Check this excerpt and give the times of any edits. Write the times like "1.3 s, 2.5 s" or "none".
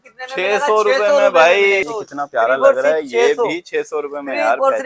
1.8 s